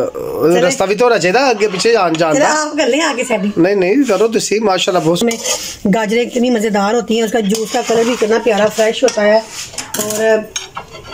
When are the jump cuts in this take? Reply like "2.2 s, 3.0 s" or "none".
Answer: 5.2 s